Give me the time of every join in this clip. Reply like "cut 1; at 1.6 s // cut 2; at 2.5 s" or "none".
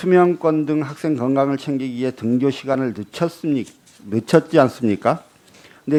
none